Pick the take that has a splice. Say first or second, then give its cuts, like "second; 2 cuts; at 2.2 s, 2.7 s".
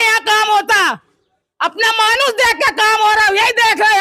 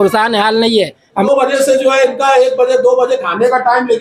second; 1 cut; at 1.3 s